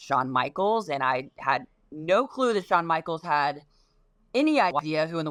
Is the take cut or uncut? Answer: uncut